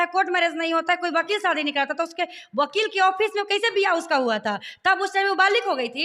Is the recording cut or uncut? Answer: uncut